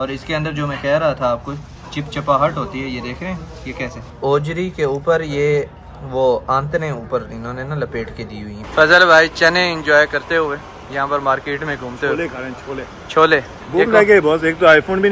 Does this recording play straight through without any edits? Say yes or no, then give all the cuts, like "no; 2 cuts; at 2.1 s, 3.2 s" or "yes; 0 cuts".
no; 2 cuts; at 4.1 s, 8.6 s